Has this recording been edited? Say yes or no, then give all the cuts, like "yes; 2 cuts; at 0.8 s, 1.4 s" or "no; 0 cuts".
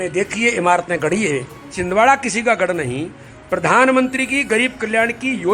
yes; 1 cut; at 1.7 s